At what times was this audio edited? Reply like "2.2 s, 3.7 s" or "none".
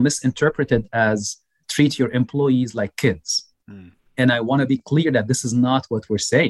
1.6 s